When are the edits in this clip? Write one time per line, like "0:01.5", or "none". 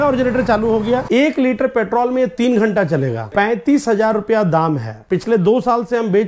0:01.0
0:03.2
0:05.0